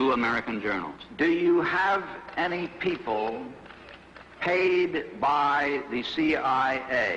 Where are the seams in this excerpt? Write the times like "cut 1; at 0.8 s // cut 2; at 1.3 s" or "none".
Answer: cut 1; at 3.1 s